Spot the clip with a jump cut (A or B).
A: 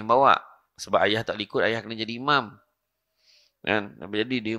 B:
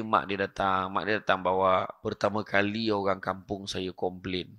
B